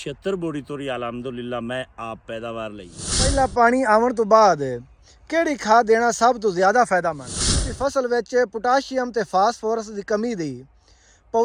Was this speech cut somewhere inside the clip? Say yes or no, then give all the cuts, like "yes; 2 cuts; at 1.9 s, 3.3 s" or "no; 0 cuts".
yes; 2 cuts; at 3.3 s, 7.6 s